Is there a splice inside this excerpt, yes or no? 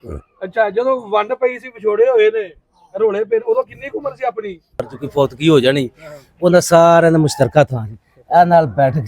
yes